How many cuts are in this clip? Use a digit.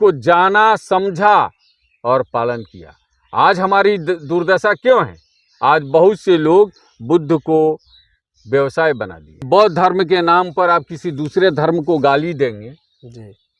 1